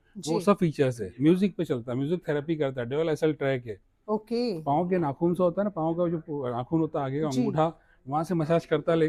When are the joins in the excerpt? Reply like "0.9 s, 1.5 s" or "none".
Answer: none